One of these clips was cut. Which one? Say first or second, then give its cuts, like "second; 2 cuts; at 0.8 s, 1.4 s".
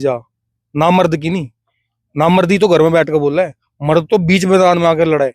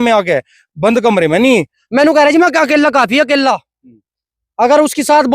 second; 1 cut; at 1.8 s